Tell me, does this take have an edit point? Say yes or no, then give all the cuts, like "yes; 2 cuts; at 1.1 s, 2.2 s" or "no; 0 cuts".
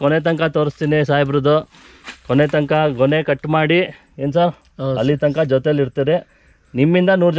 no; 0 cuts